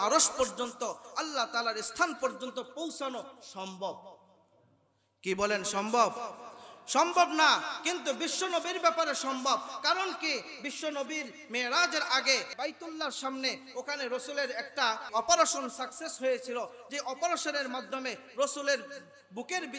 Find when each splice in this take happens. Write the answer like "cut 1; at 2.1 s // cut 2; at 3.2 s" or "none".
cut 1; at 12.5 s // cut 2; at 15.1 s